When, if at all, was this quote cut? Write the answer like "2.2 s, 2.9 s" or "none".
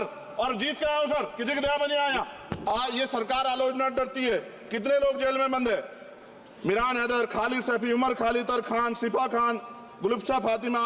2.5 s